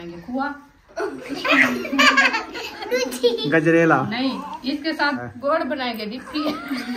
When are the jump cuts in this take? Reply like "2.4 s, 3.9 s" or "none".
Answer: 5.2 s